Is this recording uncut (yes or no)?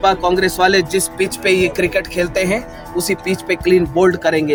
yes